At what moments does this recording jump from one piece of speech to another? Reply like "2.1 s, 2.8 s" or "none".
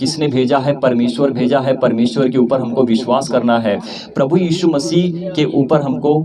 none

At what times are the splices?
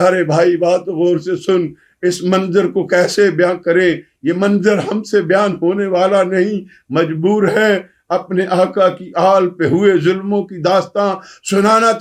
none

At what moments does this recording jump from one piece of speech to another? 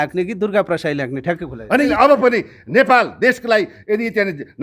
1.9 s

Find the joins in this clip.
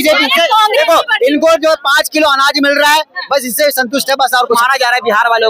4.6 s

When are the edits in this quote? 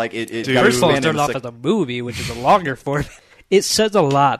3.1 s

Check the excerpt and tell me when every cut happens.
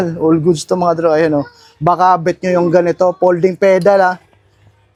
none

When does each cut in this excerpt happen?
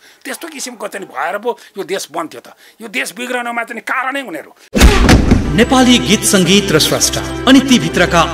4.5 s

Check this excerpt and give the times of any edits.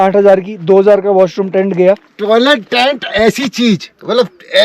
2.1 s

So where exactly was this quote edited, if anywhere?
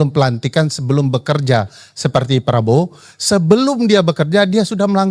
none

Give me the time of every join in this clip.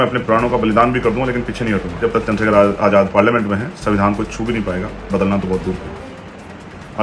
2.0 s

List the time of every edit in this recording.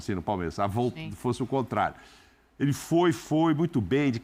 none

